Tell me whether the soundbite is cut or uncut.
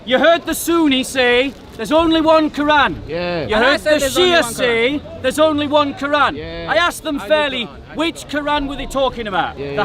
uncut